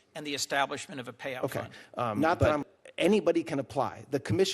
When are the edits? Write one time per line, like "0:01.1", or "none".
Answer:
0:02.6